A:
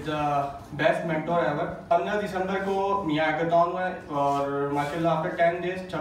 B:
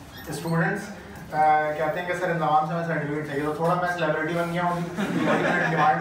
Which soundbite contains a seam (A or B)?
A